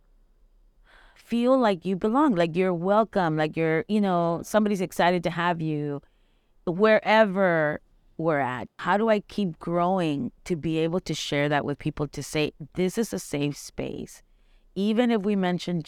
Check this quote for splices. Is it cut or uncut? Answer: cut